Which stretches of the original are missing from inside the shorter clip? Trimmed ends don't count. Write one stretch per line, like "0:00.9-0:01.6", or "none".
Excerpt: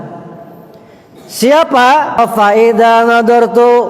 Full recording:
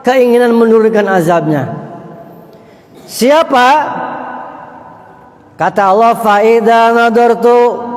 0:04.0-0:06.1